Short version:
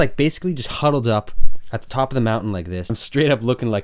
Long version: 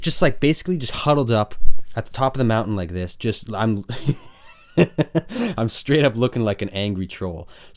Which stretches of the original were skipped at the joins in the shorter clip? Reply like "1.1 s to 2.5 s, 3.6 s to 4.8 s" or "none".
3.2 s to 5.7 s